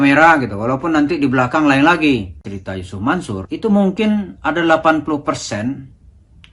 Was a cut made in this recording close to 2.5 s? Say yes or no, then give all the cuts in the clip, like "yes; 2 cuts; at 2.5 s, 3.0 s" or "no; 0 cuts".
yes; 1 cut; at 2.5 s